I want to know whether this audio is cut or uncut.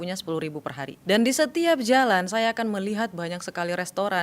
cut